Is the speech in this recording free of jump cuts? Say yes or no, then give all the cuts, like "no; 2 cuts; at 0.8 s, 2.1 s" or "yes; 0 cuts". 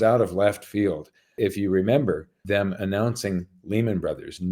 no; 2 cuts; at 1.3 s, 2.4 s